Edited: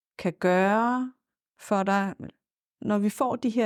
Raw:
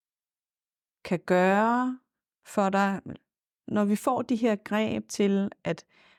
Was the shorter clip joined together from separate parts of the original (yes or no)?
no